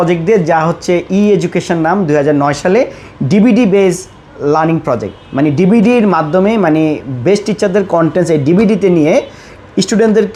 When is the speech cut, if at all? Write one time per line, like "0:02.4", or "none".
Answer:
none